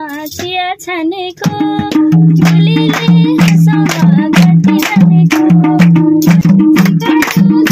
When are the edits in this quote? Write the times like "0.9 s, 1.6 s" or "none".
6.4 s